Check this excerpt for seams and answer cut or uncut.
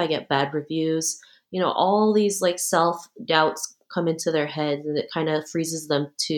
uncut